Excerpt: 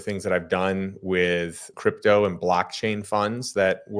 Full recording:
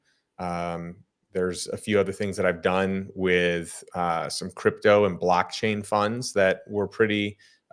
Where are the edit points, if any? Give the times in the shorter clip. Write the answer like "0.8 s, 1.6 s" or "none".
1.6 s